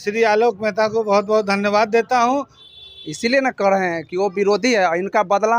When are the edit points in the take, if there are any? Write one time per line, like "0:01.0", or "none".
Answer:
0:02.6

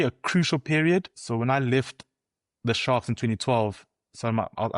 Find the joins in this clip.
0:01.2

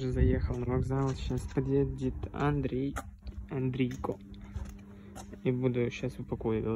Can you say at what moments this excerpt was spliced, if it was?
none

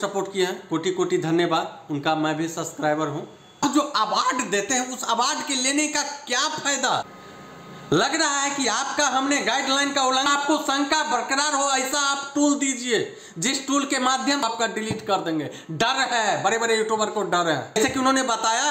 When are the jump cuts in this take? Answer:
0:03.6
0:07.0
0:10.2
0:14.4
0:17.7

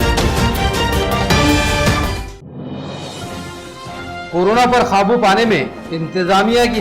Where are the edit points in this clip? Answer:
0:04.2

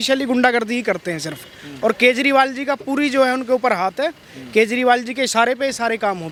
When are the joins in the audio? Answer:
none

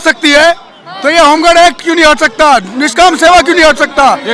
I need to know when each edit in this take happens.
none

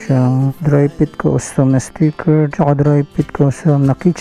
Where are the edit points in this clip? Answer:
0:02.5

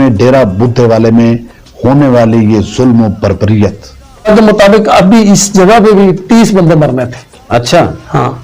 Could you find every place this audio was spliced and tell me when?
0:04.3

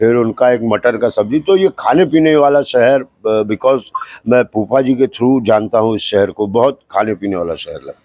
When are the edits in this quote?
none

